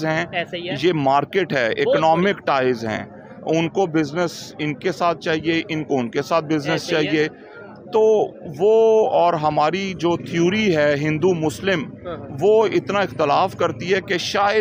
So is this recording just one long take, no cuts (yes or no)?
yes